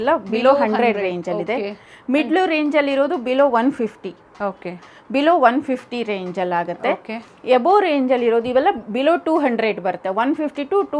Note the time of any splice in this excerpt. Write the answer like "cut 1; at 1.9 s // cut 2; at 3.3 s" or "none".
none